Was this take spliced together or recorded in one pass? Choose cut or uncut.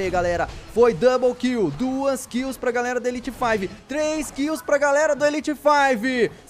uncut